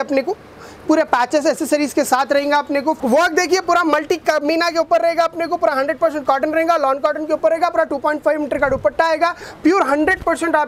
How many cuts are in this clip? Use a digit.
2